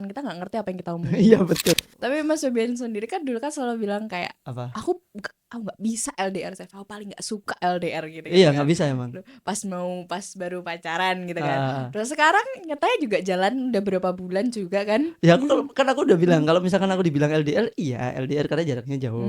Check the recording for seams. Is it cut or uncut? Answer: cut